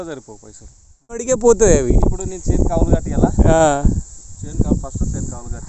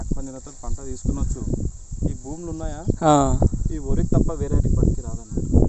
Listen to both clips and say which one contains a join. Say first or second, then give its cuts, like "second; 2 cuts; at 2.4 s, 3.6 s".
first; 1 cut; at 1.2 s